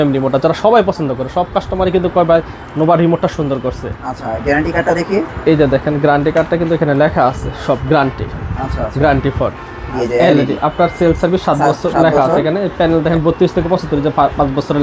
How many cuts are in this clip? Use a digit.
1